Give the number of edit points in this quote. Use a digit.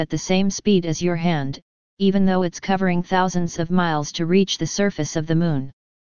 1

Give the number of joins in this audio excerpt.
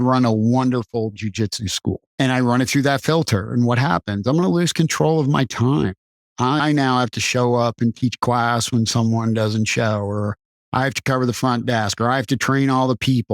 1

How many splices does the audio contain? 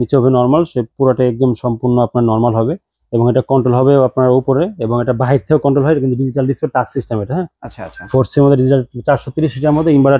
0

